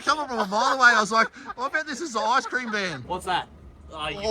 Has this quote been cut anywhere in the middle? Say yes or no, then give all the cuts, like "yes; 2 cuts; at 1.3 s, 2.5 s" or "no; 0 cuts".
yes; 1 cut; at 3.0 s